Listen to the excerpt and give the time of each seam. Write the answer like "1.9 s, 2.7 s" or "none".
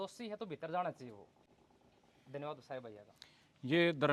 none

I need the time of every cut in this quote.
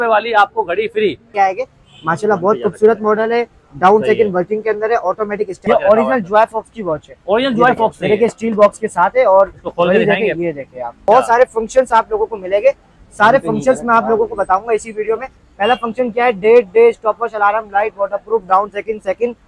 1.3 s, 5.6 s, 11.0 s

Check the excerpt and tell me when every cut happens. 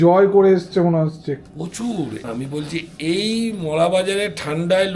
2.2 s

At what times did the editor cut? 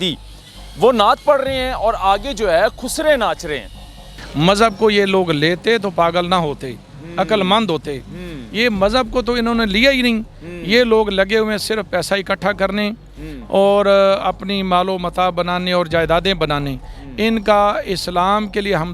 4.2 s

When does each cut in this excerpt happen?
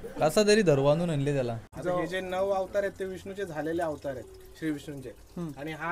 1.7 s

